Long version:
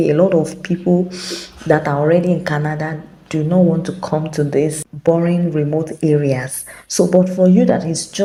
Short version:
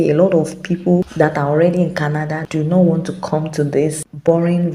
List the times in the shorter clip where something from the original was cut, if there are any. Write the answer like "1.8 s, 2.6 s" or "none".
1.1 s, 2.4 s